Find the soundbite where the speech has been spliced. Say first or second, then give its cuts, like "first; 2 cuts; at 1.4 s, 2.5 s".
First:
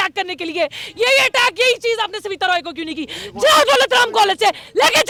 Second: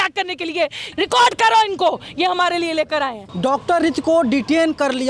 second; 2 cuts; at 0.8 s, 3.2 s